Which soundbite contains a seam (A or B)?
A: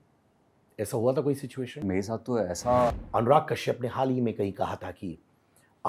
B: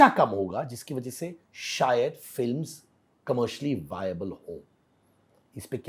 A